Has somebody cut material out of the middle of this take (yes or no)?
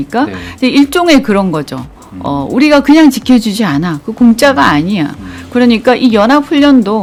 no